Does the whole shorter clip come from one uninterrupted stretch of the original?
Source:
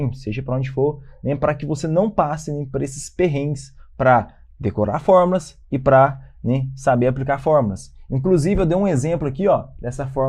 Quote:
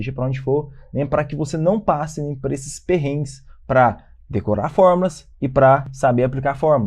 no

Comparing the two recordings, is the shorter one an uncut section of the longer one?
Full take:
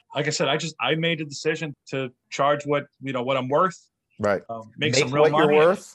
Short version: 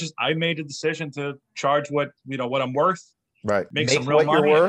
no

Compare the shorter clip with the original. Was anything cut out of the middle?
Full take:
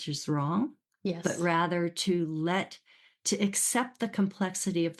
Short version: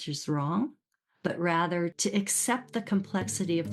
yes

